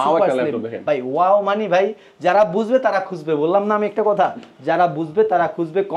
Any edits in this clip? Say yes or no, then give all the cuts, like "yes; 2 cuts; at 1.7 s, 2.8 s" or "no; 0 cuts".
no; 0 cuts